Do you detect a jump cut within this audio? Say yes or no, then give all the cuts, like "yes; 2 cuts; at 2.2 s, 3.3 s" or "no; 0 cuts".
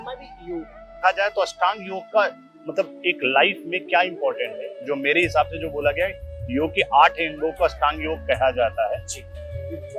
yes; 1 cut; at 1.0 s